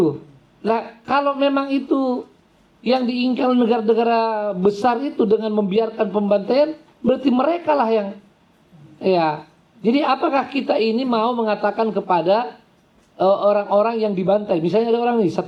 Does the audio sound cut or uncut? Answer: uncut